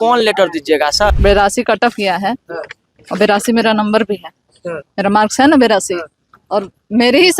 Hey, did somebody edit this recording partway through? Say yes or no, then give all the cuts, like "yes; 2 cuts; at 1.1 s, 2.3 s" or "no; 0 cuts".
yes; 1 cut; at 1.1 s